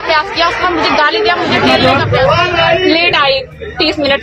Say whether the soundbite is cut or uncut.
cut